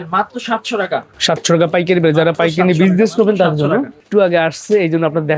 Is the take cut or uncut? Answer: cut